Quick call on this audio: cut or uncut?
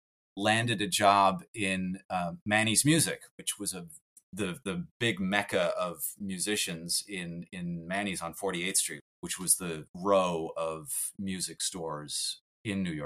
uncut